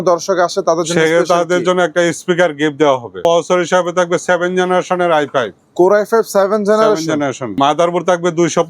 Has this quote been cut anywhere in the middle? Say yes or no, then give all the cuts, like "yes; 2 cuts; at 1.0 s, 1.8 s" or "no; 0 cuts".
yes; 2 cuts; at 3.2 s, 7.6 s